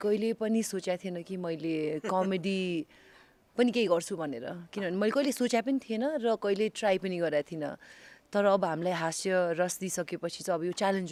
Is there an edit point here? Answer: no; 0 cuts

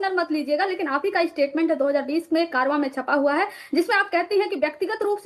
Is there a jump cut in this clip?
no; 0 cuts

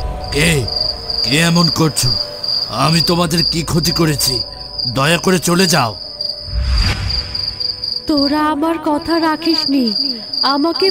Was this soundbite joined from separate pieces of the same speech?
no; 0 cuts

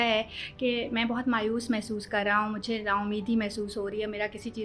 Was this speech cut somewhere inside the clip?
no; 0 cuts

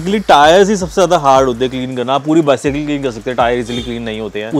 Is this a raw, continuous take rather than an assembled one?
yes; 0 cuts

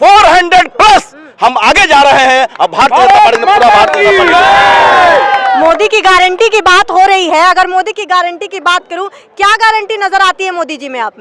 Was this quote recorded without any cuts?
yes; 0 cuts

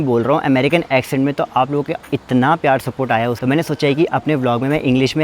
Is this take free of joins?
no; 1 cut; at 3.4 s

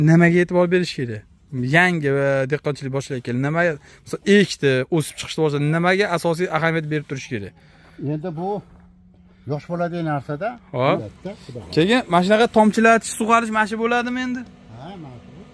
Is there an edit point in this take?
yes; 1 cut; at 11.1 s

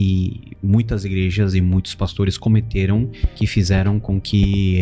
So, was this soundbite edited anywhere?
yes; 1 cut; at 3.2 s

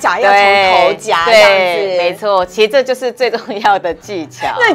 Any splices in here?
no; 0 cuts

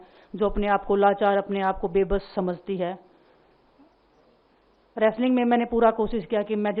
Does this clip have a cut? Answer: no; 0 cuts

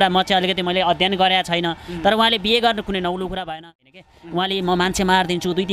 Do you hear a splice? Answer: yes; 1 cut; at 3.8 s

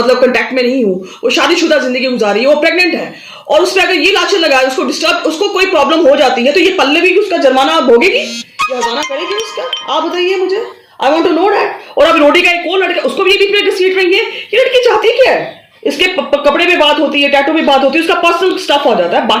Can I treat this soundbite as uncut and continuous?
yes; 0 cuts

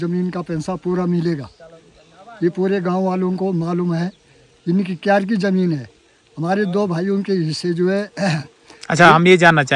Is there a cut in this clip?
no; 0 cuts

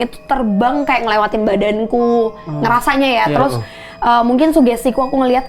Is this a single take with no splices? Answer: yes; 0 cuts

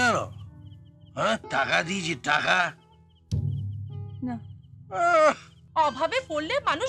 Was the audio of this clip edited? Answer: yes; 2 cuts; at 1.4 s, 5.5 s

